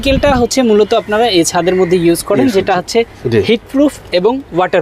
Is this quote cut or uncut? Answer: uncut